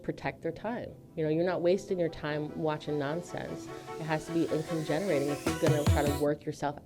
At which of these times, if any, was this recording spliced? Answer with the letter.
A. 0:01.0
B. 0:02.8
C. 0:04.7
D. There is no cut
A